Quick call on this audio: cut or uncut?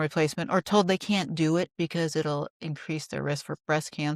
uncut